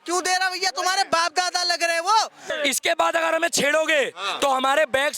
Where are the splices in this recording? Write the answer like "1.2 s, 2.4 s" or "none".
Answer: 2.5 s